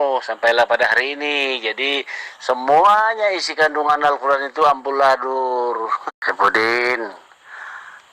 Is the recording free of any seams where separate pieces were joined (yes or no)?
no